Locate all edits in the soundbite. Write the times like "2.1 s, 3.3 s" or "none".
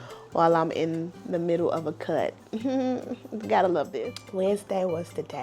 3.9 s